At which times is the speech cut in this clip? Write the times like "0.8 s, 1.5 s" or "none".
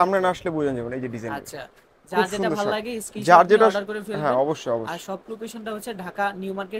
none

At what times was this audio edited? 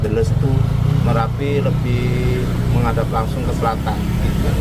none

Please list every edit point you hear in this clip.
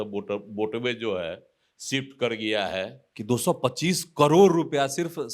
3.0 s

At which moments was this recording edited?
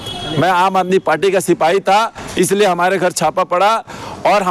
none

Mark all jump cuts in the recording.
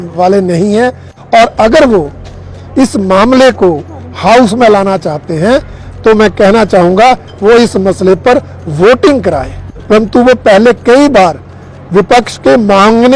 1.1 s, 9.7 s

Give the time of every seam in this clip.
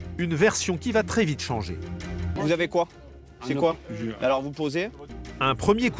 2.3 s, 5.1 s

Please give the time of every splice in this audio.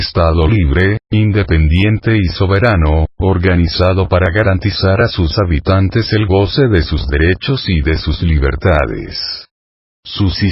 none

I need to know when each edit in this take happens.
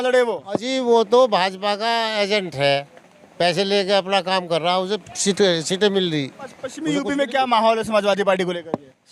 6.7 s

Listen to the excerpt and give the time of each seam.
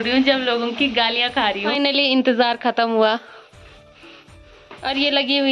none

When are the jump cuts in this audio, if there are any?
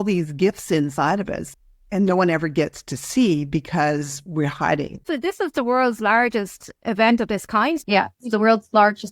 1.4 s, 5.0 s, 7.8 s

